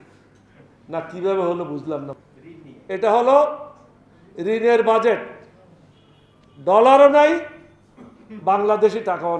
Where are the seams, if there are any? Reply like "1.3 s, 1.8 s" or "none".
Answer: 2.1 s